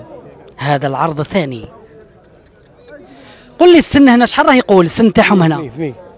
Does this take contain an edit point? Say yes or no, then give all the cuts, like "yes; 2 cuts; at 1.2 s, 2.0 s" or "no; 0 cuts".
no; 0 cuts